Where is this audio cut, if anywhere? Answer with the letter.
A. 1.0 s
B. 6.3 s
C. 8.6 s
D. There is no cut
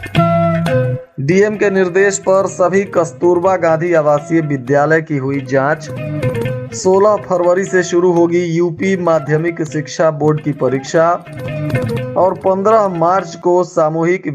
A